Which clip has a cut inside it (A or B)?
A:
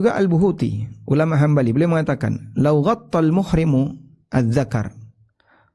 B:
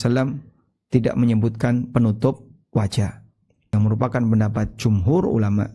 B